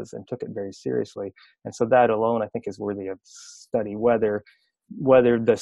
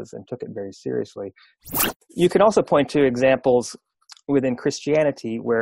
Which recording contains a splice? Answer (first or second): second